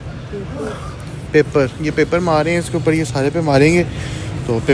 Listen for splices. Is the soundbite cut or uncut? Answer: uncut